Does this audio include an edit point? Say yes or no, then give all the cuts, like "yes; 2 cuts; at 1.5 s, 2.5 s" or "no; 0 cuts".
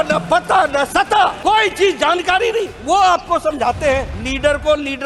yes; 2 cuts; at 1.4 s, 4.2 s